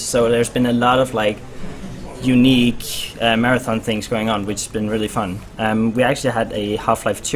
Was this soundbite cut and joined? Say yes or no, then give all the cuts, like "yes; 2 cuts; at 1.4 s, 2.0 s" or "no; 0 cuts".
no; 0 cuts